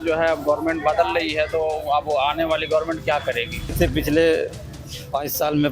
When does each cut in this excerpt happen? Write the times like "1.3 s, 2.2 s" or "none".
3.7 s